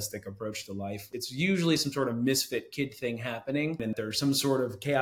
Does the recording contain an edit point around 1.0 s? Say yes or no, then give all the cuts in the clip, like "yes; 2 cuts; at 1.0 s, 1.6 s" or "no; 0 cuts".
yes; 2 cuts; at 1.0 s, 4.0 s